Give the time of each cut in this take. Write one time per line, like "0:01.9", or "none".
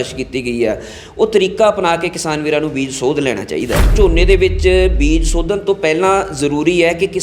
0:03.9